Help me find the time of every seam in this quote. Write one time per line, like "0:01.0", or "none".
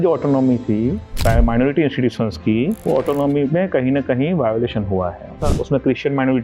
0:01.1
0:02.8
0:05.4